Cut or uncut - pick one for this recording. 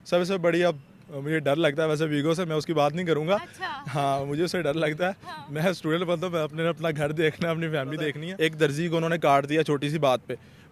cut